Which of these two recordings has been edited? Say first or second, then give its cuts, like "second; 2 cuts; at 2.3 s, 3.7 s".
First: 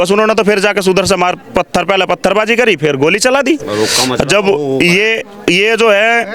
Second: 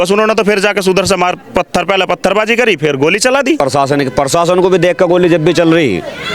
second; 1 cut; at 3.6 s